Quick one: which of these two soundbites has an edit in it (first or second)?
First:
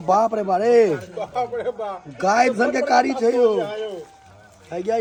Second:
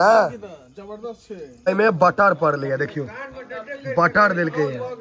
second